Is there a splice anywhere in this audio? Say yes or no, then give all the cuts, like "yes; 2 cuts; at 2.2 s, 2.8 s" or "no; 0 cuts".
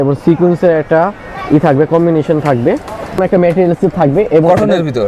yes; 1 cut; at 3.2 s